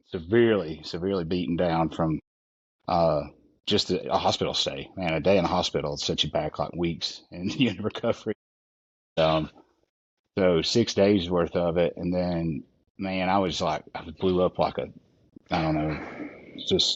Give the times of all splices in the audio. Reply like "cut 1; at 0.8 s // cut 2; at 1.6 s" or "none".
none

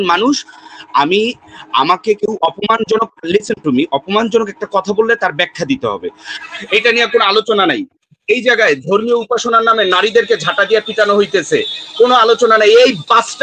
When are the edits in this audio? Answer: cut 1; at 6.3 s

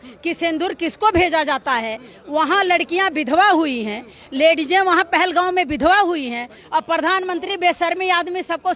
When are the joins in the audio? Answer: none

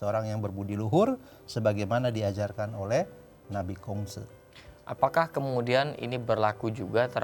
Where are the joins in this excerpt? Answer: none

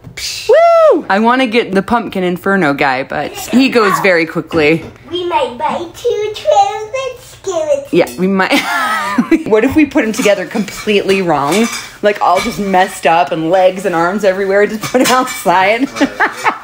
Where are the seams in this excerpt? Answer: cut 1; at 1.5 s // cut 2; at 3.5 s // cut 3; at 4.9 s // cut 4; at 9.4 s

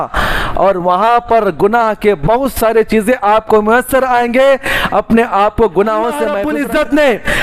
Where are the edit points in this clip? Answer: cut 1; at 6.4 s

